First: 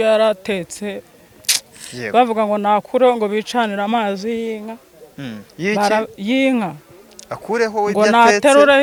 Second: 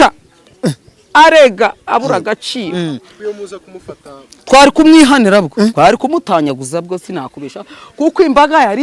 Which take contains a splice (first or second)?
second